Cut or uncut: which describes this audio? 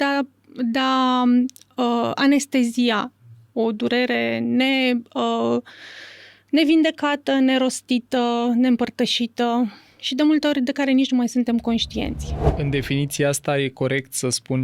cut